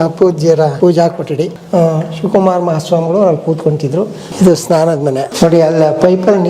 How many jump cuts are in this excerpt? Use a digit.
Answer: 4